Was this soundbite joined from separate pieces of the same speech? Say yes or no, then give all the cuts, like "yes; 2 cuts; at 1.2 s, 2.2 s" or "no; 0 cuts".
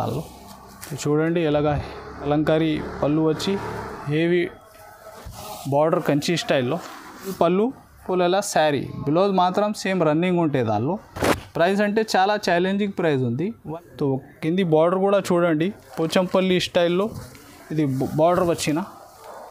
yes; 3 cuts; at 2.3 s, 7.3 s, 13.6 s